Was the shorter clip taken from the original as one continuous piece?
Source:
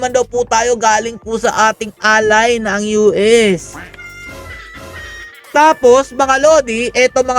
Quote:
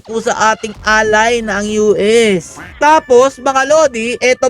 no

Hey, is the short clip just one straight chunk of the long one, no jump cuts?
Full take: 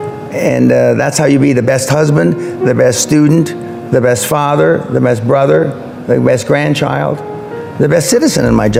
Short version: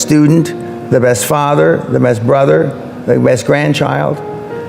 yes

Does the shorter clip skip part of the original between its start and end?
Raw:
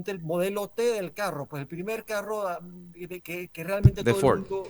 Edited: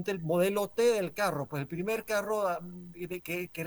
no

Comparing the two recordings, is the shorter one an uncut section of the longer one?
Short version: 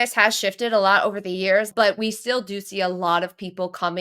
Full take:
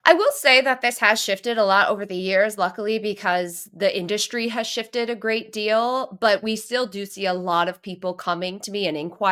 no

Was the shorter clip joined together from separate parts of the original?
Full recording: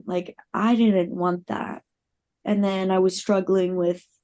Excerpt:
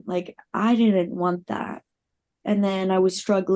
no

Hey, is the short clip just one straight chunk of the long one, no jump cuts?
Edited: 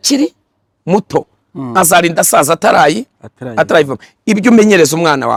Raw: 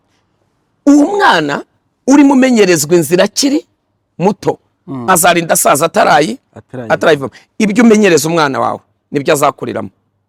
yes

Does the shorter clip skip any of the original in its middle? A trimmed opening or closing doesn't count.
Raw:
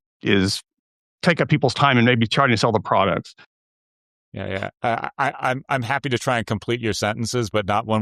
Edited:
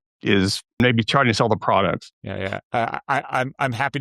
yes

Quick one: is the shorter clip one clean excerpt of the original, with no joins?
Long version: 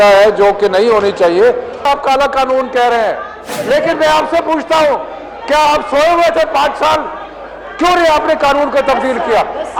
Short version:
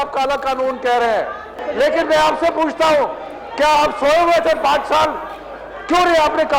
yes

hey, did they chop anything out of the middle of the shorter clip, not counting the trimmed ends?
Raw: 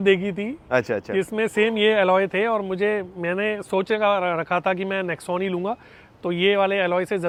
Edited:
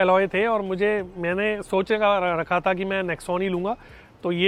no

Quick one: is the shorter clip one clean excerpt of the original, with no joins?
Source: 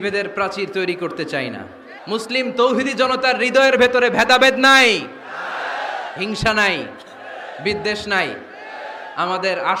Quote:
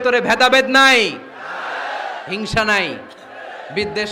yes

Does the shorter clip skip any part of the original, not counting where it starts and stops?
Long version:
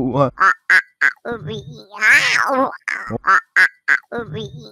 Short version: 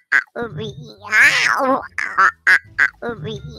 yes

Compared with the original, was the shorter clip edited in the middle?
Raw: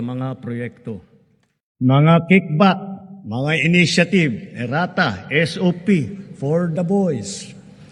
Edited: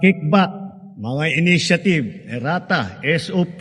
no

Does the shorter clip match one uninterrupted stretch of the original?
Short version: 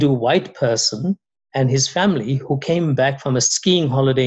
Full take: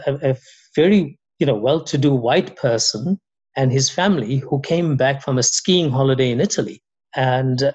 yes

